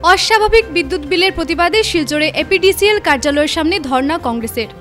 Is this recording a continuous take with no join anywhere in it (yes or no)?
yes